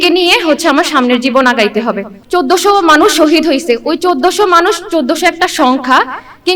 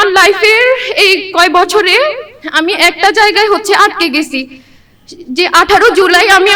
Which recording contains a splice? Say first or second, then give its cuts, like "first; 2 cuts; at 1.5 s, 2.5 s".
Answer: first; 1 cut; at 2.1 s